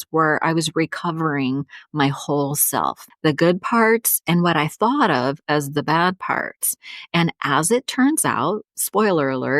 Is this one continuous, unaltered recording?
no; 1 cut; at 3.1 s

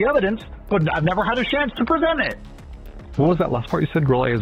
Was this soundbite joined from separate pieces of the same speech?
no; 0 cuts

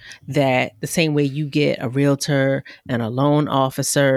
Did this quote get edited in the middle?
no; 0 cuts

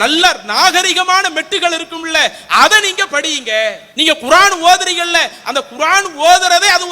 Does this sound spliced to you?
yes; 1 cut; at 3.9 s

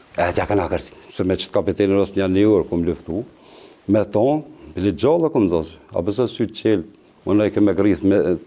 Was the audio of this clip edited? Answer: yes; 1 cut; at 1.0 s

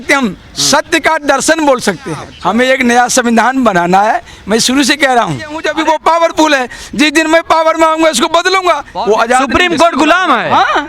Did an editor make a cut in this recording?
yes; 3 cuts; at 2.3 s, 5.6 s, 8.9 s

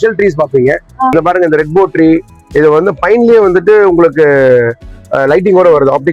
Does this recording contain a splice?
yes; 1 cut; at 1.1 s

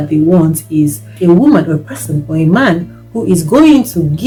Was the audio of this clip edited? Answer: no; 0 cuts

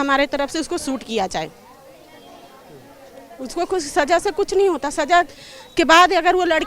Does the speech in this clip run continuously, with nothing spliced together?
yes; 0 cuts

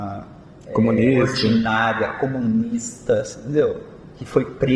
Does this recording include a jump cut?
no; 0 cuts

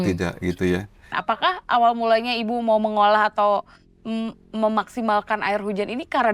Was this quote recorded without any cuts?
no; 1 cut; at 1.1 s

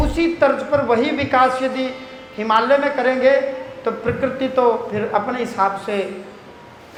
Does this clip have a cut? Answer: no; 0 cuts

